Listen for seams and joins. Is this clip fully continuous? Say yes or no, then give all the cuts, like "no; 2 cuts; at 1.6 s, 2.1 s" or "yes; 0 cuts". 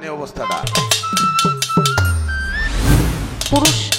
no; 1 cut; at 2.8 s